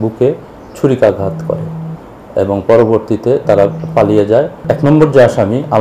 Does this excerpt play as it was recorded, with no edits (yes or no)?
no